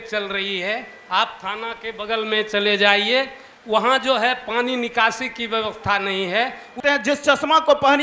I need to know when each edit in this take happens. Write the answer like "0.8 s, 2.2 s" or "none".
6.8 s